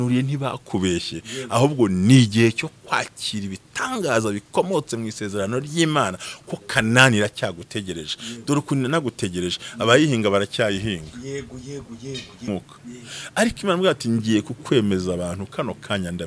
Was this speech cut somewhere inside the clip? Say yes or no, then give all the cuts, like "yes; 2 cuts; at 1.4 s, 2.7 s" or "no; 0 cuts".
yes; 1 cut; at 12.5 s